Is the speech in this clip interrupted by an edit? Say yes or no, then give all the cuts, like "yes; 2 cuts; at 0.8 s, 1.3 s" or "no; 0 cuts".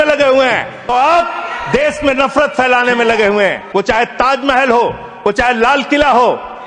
yes; 2 cuts; at 0.9 s, 3.6 s